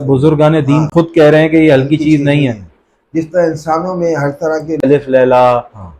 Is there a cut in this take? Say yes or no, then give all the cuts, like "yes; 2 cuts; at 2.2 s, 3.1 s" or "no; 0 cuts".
yes; 1 cut; at 4.8 s